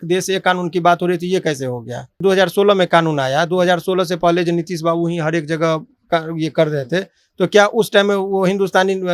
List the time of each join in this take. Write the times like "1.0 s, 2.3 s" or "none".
2.2 s